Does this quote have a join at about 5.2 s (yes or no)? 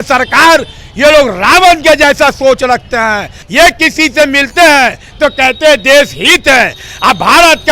no